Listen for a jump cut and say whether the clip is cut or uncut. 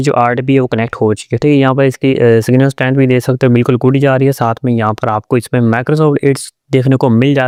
uncut